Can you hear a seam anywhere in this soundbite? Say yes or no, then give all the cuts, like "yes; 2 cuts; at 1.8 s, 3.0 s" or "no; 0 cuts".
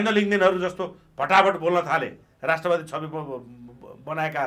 no; 0 cuts